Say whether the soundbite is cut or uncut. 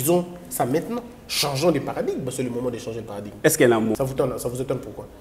cut